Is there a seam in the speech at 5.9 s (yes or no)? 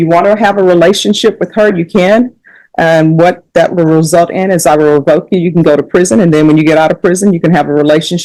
no